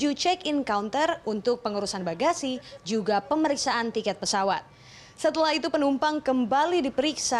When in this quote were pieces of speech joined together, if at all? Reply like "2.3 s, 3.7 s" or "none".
none